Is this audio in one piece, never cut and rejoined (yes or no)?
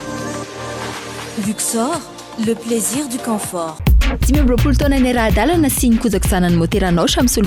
yes